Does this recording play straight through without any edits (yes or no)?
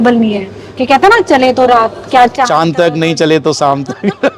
yes